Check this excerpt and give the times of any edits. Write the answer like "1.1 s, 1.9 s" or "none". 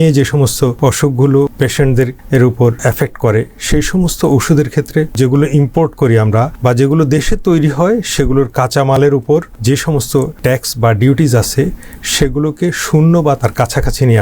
0.7 s, 1.8 s, 2.8 s, 5.1 s, 6.5 s, 10.0 s